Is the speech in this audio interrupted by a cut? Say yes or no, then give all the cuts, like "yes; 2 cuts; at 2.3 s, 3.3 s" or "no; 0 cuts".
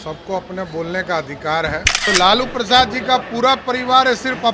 yes; 1 cut; at 2.0 s